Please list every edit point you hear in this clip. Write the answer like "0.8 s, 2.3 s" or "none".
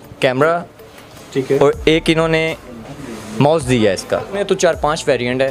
4.4 s